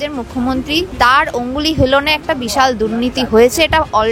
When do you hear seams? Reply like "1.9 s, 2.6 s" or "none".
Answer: 0.9 s